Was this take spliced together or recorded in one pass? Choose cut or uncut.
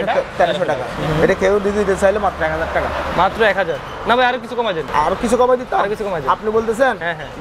cut